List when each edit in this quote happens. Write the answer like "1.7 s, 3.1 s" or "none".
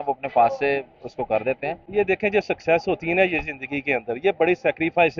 1.7 s